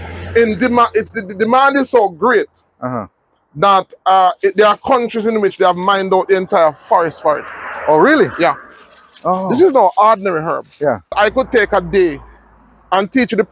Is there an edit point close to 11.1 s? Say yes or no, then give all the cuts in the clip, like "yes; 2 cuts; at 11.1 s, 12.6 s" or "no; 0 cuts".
yes; 1 cut; at 11.1 s